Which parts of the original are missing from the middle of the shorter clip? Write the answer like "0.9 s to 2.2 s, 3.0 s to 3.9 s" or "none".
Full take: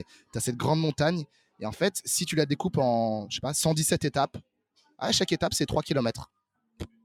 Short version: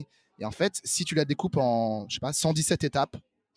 none